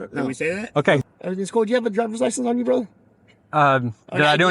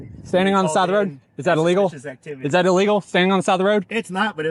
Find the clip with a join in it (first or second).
first